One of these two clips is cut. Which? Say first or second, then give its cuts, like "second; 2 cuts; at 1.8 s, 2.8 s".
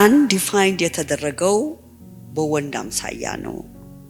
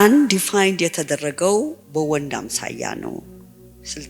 second; 1 cut; at 1.8 s